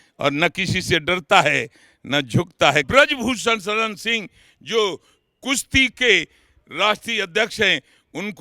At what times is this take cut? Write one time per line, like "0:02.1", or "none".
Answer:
0:02.9